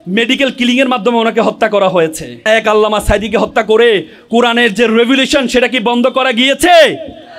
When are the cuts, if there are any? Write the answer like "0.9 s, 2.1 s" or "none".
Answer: 2.4 s